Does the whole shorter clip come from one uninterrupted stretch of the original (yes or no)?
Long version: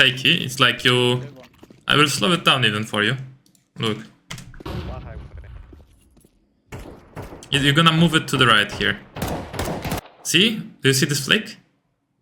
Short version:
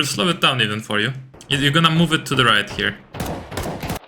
no